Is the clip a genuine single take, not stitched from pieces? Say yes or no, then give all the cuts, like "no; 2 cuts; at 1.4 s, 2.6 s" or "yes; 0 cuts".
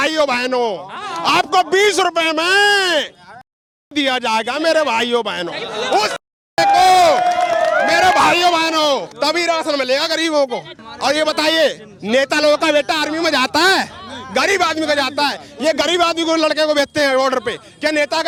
yes; 0 cuts